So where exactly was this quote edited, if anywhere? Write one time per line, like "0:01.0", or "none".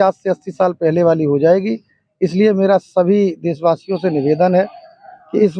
none